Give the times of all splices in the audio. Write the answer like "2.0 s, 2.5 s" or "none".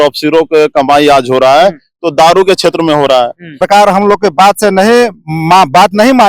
3.6 s

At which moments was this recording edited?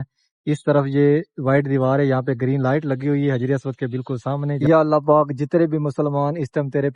4.6 s

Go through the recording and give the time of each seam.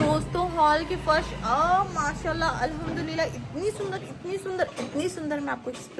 none

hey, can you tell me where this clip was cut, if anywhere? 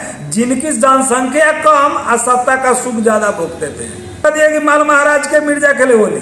4.2 s

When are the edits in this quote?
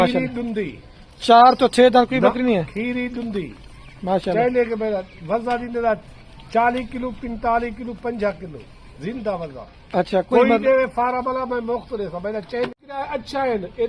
12.9 s

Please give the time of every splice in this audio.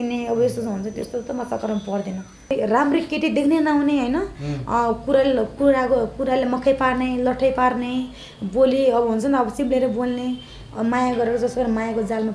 2.5 s

